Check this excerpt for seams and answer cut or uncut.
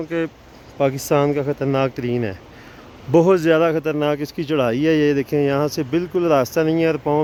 uncut